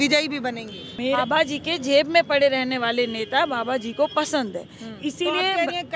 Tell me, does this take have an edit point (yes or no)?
yes